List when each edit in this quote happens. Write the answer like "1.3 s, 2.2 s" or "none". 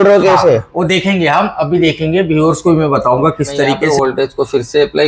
3.8 s